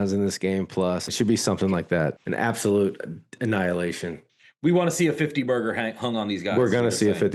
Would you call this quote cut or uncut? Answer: uncut